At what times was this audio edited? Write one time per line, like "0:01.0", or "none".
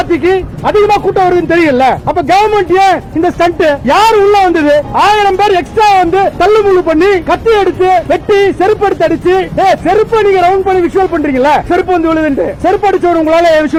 none

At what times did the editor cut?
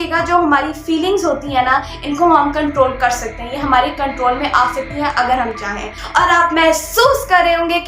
0:05.9

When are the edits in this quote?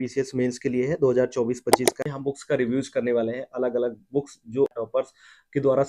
0:02.1
0:04.7

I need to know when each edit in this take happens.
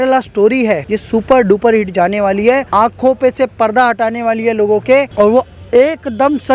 0:00.9
0:02.6
0:05.1

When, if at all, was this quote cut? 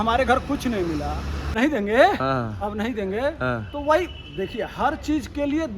0:01.5

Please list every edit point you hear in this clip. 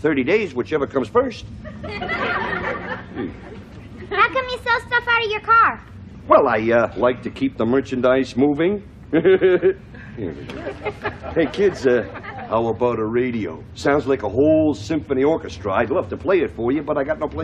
0:15.8

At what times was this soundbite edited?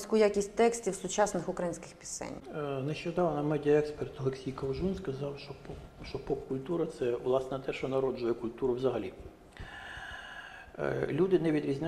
none

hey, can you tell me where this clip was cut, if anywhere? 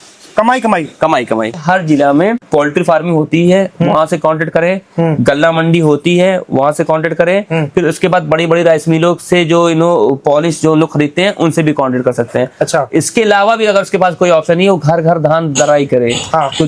0:01.6
0:02.4

